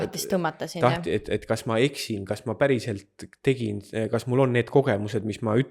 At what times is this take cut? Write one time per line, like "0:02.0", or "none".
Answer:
none